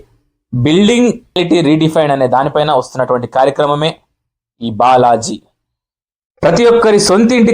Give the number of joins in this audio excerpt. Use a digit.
1